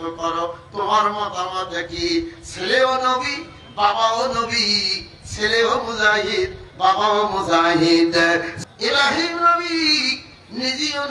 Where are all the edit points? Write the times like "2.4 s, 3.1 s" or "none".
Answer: 8.5 s

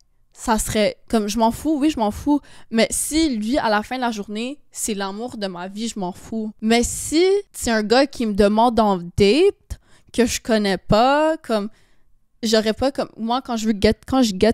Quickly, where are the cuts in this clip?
6.5 s, 7.5 s

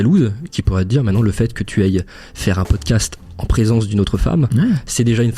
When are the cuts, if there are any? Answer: none

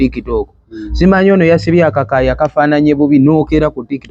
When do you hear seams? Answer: none

